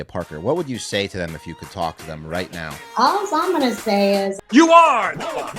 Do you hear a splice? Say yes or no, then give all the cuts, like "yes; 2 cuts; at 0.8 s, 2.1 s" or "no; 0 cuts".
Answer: yes; 2 cuts; at 2.8 s, 4.4 s